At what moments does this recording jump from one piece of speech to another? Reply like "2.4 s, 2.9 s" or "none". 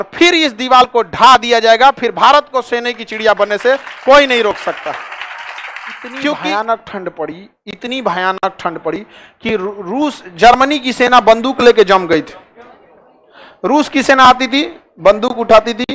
6.4 s